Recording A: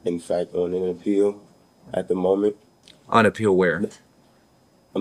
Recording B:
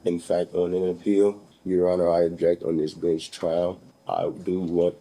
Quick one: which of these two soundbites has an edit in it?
B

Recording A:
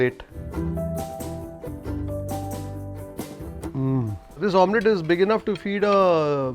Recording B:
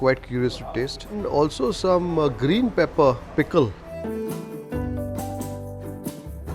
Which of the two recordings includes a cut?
A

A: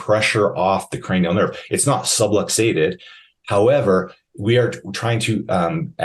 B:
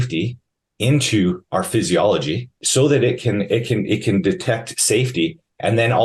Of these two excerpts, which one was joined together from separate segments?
B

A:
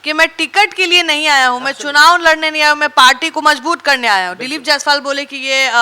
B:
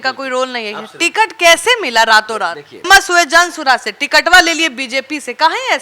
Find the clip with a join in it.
B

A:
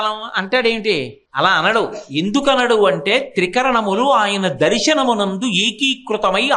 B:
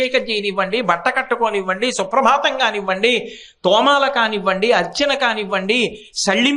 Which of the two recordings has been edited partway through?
A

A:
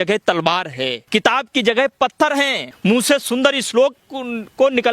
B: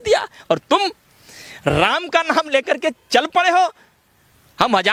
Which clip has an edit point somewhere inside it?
A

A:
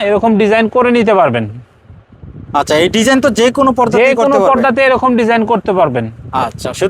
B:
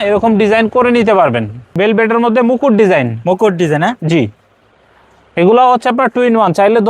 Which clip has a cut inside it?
B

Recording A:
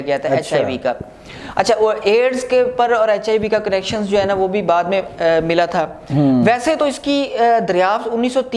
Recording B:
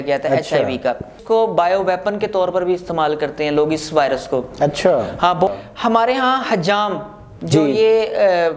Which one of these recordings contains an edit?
B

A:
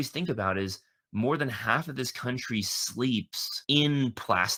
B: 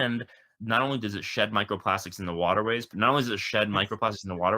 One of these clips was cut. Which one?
B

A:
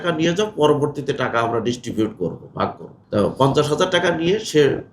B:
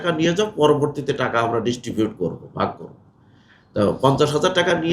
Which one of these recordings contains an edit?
A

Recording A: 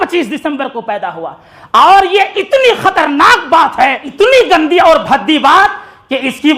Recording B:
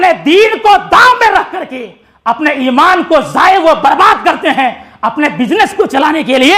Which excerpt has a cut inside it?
A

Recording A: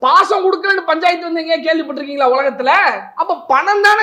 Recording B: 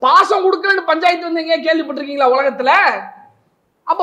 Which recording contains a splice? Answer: A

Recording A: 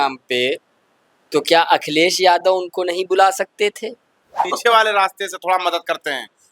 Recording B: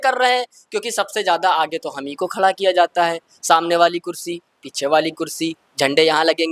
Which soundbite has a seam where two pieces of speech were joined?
A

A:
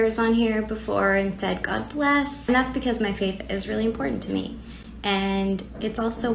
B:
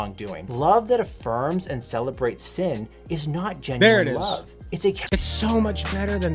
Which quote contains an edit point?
B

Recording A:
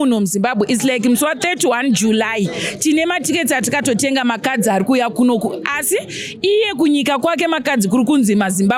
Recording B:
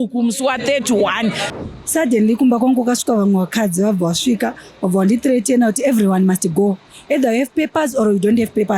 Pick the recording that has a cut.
B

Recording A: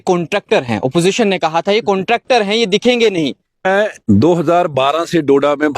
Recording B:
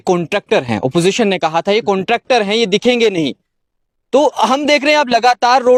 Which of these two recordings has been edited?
A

